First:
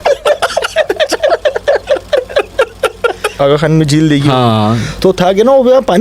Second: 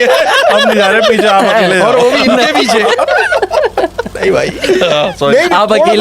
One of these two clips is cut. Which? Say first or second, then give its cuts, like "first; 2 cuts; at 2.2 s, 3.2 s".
first; 2 cuts; at 3.2 s, 4.9 s